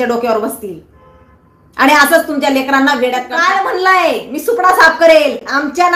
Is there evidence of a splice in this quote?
yes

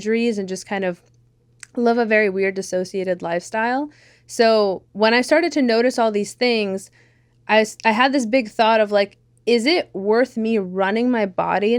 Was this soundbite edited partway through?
no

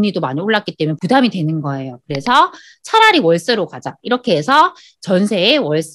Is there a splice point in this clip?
yes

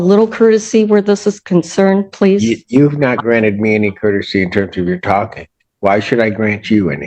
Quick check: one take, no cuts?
yes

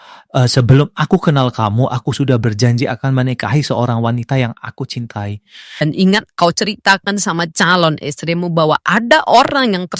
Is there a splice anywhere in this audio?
yes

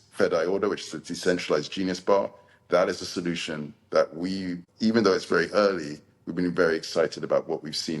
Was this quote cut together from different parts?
yes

